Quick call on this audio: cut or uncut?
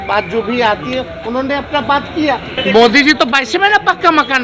cut